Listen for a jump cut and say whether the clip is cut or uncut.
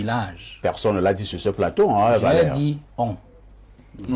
uncut